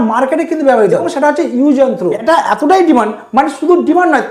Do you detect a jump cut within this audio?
yes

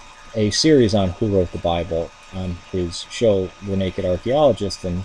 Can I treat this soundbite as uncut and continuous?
no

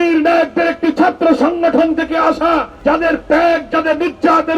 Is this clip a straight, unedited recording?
no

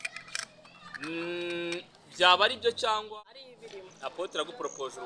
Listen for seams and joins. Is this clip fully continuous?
no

